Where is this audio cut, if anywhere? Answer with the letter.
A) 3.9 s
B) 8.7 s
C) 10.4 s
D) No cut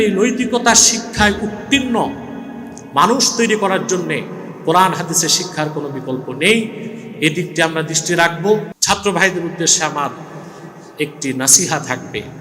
B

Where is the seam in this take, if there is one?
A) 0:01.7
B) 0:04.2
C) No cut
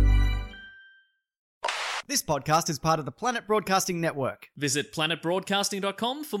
A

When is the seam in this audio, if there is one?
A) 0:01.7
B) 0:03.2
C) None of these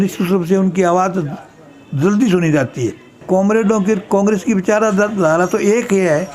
B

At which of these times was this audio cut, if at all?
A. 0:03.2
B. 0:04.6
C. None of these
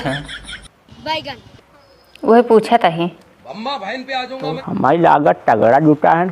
B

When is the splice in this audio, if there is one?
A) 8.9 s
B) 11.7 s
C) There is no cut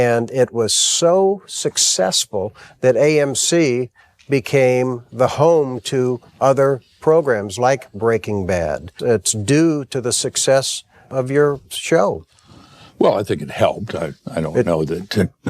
A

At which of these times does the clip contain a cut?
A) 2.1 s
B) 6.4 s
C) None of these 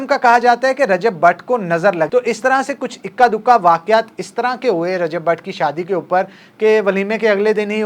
A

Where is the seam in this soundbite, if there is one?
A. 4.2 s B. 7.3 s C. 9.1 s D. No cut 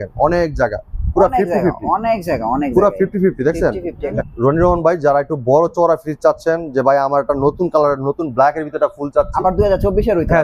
A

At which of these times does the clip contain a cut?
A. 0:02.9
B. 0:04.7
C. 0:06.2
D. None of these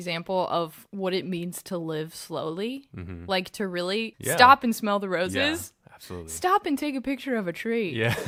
D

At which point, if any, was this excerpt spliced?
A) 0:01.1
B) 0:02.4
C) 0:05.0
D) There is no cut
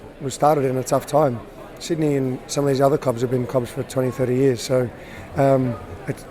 D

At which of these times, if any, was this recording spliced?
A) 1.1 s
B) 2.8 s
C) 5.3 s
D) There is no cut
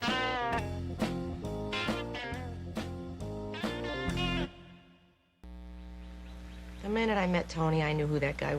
C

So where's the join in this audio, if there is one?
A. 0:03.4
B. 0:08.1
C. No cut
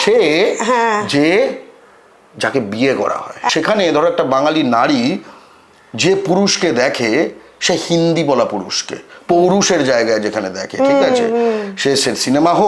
A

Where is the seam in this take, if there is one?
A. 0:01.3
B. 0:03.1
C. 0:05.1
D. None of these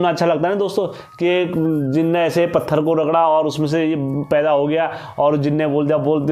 D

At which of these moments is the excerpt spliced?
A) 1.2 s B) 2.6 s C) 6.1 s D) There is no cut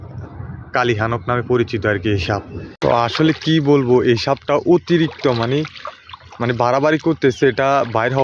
B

